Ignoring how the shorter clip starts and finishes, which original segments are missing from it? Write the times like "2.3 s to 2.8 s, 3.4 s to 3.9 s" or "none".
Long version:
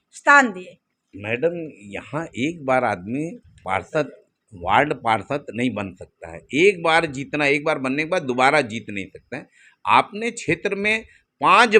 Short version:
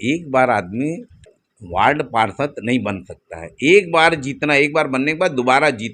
3.6 s to 4.2 s

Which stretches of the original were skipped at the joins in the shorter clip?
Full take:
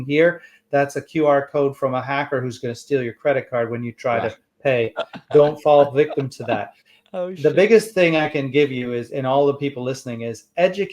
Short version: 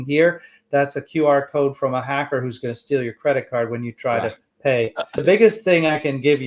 5.2 s to 7.5 s

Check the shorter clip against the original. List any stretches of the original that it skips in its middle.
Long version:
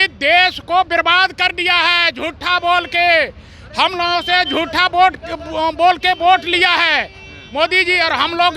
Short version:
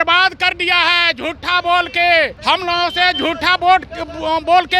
3.3 s to 3.7 s

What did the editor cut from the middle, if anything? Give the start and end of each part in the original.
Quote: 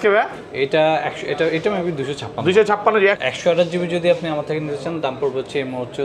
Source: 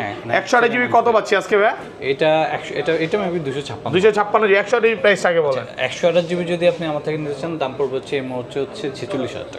4.7 s to 5.7 s

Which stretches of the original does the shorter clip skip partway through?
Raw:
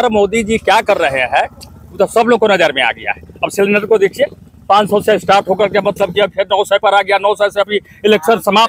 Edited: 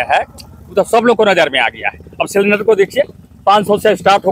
none

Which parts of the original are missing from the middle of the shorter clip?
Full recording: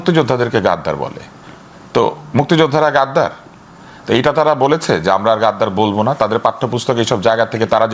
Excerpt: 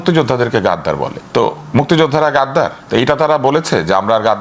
1.2 s to 1.8 s, 3.4 s to 4.0 s

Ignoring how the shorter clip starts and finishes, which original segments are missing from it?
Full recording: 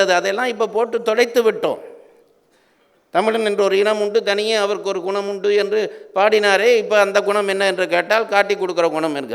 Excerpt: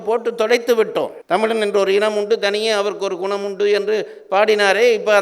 1.8 s to 3.0 s

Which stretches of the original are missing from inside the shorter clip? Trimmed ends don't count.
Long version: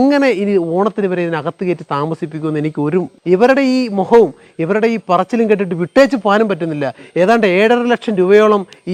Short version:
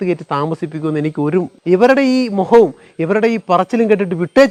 none

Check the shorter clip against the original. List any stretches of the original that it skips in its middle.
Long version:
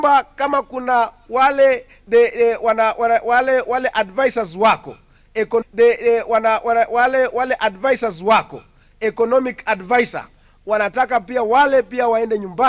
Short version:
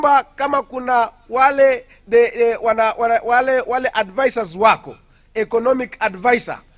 5.6 s to 9.3 s

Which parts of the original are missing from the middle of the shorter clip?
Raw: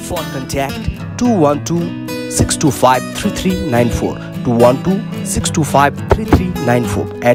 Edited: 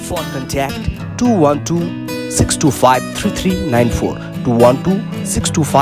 none

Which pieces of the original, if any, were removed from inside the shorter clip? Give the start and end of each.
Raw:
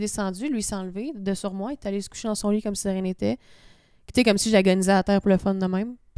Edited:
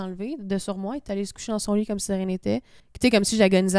3.6 s to 3.9 s

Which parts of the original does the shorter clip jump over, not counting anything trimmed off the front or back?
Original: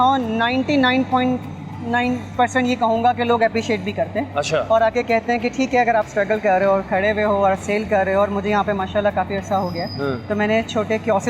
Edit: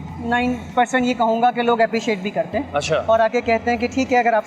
none

